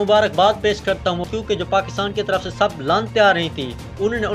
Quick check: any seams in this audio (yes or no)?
yes